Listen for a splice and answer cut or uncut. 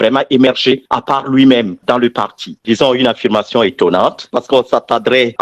cut